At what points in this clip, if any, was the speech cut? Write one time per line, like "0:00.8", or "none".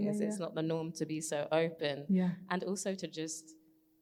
none